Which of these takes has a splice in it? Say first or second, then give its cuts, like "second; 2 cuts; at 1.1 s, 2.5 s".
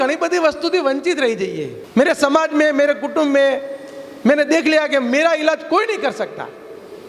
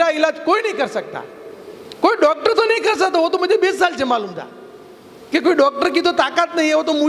first; 1 cut; at 1.7 s